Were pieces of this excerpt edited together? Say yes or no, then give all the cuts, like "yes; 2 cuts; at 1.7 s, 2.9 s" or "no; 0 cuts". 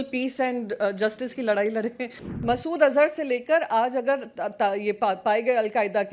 yes; 1 cut; at 2.4 s